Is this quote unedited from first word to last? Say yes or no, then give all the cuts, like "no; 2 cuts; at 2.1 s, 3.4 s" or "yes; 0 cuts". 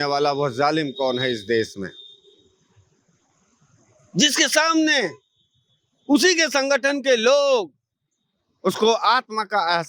yes; 0 cuts